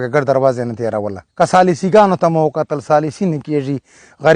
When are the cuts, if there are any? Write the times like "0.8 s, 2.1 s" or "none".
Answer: 1.2 s